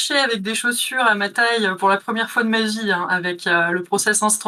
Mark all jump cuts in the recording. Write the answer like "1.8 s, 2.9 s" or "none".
none